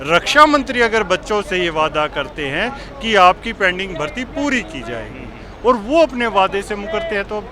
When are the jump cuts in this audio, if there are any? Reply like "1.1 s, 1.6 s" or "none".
none